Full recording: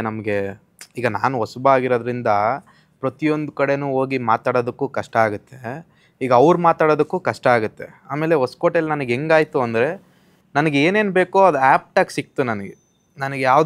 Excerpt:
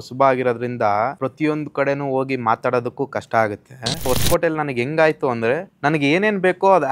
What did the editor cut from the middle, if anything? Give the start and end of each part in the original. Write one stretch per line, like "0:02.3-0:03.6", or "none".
0:02.6-0:03.0
0:05.9-0:08.4
0:10.0-0:10.4